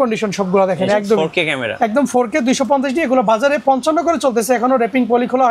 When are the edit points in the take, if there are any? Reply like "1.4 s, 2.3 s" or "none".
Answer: none